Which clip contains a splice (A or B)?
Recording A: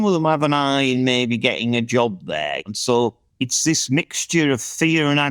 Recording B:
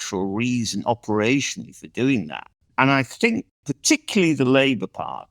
B